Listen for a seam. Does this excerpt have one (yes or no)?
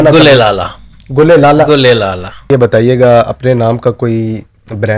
yes